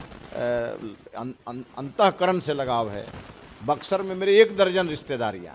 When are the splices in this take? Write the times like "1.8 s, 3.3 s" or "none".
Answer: none